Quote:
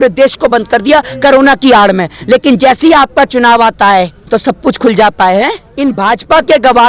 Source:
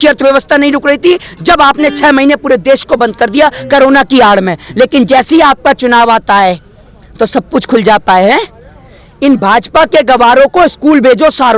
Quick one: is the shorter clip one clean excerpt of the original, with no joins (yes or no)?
no